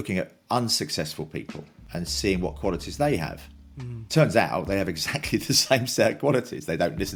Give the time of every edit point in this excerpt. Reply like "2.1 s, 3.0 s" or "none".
none